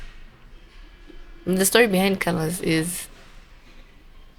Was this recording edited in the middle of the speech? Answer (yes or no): no